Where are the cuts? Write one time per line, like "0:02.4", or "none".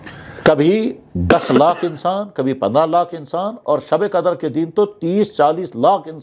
none